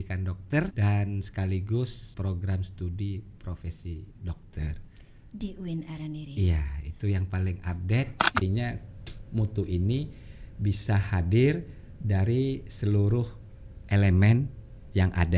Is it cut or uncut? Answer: cut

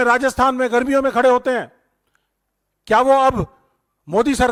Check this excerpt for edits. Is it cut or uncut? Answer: uncut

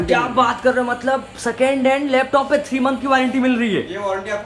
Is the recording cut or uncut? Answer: uncut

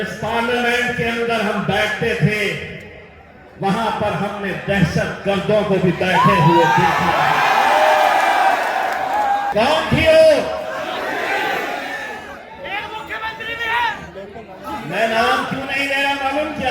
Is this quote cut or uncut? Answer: cut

